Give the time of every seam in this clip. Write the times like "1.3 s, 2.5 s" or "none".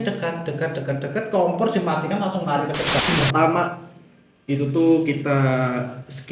3.0 s